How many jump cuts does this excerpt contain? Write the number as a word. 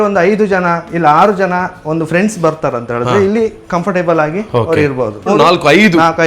one